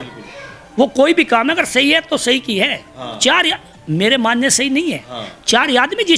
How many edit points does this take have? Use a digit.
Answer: 0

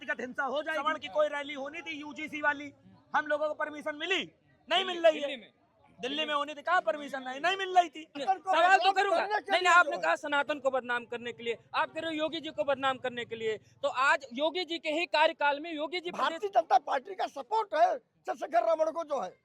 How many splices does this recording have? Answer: 3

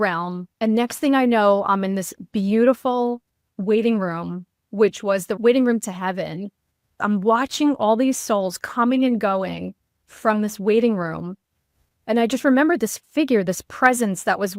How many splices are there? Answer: 2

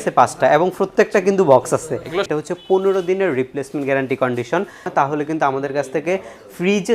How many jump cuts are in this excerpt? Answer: 2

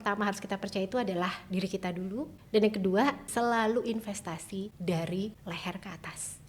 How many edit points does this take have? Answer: 4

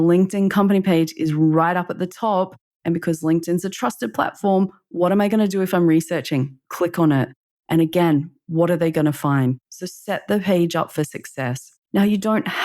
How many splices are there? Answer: 1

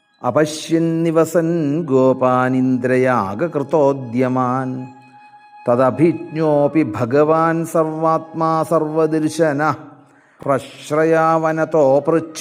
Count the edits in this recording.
1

